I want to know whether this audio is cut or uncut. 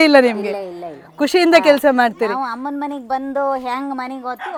uncut